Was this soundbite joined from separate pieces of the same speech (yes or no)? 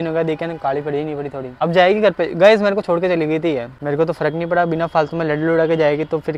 yes